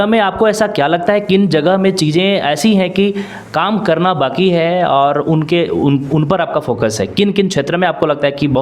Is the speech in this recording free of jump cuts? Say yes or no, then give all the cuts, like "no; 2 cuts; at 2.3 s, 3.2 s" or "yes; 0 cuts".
yes; 0 cuts